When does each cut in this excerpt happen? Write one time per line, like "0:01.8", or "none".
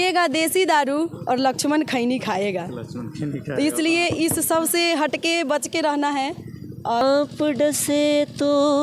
0:07.0

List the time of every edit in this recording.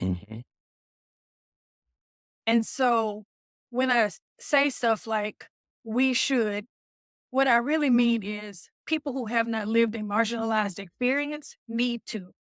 none

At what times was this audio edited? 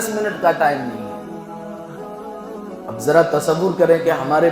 0:01.0
0:03.0

